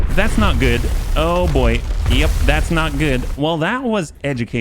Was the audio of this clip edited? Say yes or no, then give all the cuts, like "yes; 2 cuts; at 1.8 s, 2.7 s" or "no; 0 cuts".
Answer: yes; 1 cut; at 3.3 s